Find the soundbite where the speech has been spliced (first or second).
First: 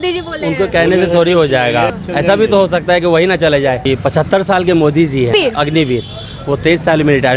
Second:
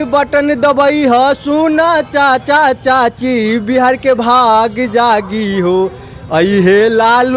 first